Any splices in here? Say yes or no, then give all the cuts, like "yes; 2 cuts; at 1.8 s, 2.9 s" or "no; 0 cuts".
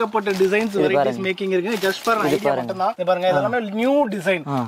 no; 0 cuts